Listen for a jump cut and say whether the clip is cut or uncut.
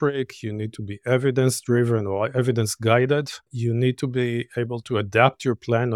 cut